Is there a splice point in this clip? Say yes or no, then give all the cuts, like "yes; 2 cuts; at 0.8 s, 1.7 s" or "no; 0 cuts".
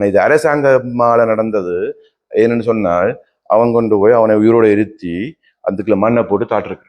no; 0 cuts